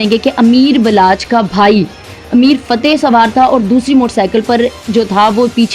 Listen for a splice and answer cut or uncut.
uncut